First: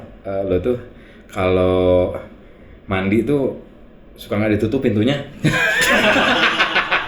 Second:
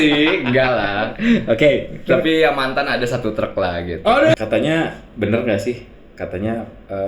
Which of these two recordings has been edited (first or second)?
second